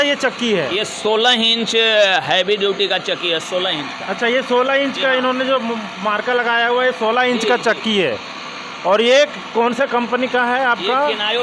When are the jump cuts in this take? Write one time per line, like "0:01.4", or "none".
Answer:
none